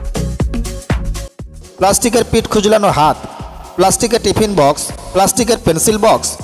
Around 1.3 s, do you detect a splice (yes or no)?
yes